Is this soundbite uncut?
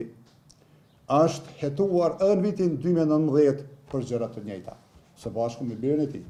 yes; 0 cuts

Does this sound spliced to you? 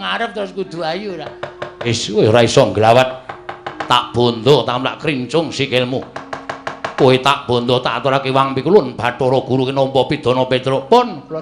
yes; 1 cut; at 1.9 s

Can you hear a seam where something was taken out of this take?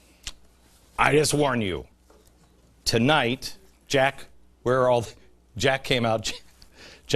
no; 0 cuts

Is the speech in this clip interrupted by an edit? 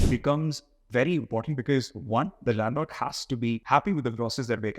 yes; 1 cut; at 3.6 s

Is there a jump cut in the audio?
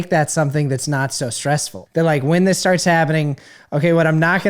yes; 1 cut; at 1.8 s

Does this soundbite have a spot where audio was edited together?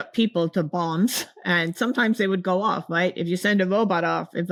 no; 0 cuts

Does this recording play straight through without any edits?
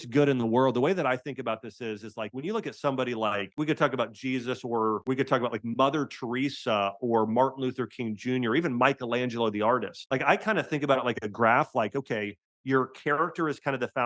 no; 3 cuts; at 3.5 s, 5.0 s, 9.9 s

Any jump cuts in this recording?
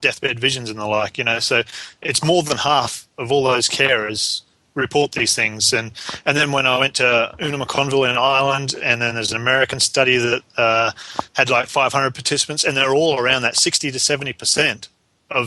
no; 0 cuts

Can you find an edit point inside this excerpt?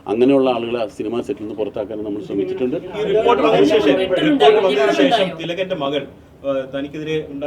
no; 0 cuts

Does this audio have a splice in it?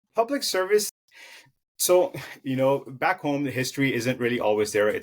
yes; 1 cut; at 0.9 s

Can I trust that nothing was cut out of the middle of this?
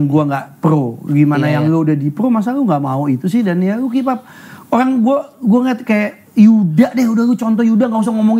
yes; 0 cuts

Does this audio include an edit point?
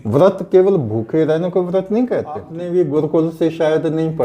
yes; 1 cut; at 2.6 s

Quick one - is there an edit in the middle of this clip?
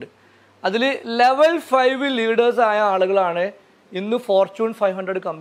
no; 0 cuts

